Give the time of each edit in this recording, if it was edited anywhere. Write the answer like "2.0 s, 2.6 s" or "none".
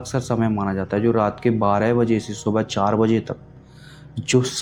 none